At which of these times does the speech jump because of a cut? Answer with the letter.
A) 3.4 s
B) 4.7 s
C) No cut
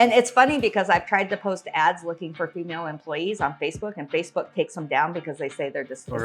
C